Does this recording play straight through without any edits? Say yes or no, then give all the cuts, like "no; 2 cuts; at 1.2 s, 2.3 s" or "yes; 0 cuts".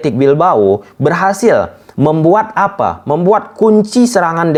yes; 0 cuts